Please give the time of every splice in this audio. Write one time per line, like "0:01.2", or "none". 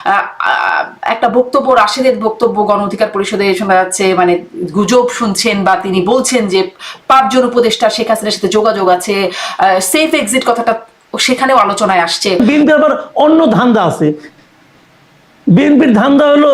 0:12.4